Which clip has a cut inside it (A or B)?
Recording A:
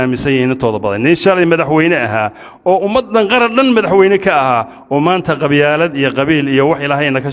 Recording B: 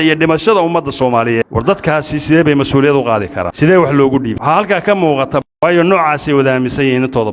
B